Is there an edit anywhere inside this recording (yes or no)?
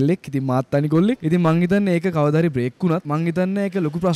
yes